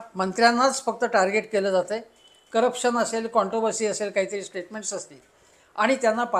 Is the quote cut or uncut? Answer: uncut